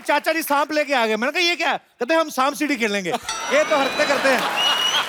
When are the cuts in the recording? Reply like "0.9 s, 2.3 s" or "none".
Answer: none